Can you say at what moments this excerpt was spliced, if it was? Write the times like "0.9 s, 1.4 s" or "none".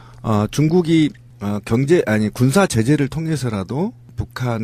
none

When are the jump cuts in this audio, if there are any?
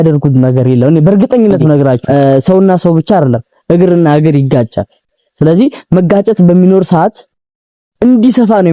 2.0 s

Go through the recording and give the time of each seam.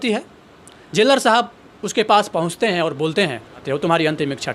3.5 s

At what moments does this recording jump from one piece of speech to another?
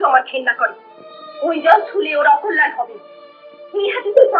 none

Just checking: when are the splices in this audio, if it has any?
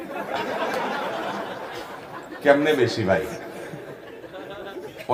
none

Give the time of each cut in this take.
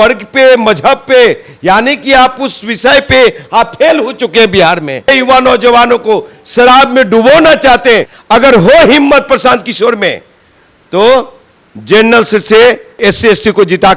5.1 s, 8.1 s, 13.0 s

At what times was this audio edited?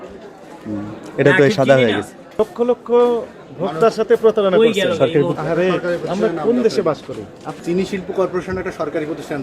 2.4 s, 5.4 s, 7.5 s

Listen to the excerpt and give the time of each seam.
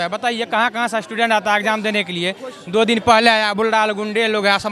none

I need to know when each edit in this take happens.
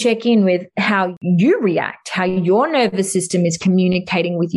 1.2 s

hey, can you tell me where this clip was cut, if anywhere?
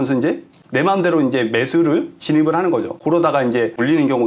none

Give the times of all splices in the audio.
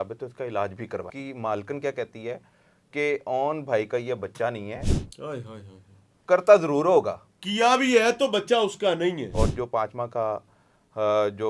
1.1 s, 9.3 s

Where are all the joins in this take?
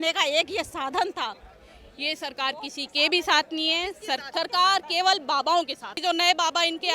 1.5 s, 4.3 s, 6.0 s

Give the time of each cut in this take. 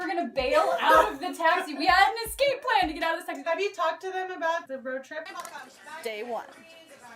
3.3 s, 5.3 s

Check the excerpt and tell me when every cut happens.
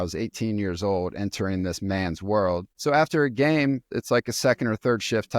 2.7 s, 3.9 s

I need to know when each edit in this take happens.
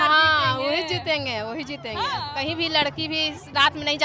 2.2 s

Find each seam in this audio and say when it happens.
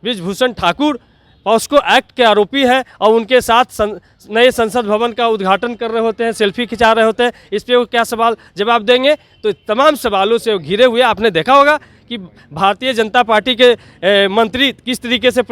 none

